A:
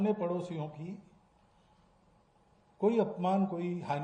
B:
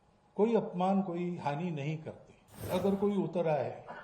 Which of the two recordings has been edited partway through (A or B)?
B